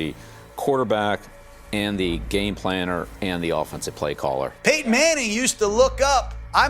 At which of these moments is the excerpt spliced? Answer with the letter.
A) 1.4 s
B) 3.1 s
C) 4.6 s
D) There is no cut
C